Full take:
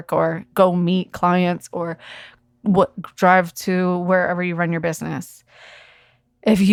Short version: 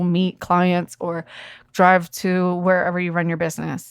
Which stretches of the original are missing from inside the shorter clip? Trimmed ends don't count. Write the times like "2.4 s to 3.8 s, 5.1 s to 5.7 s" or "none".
2.3 s to 3.0 s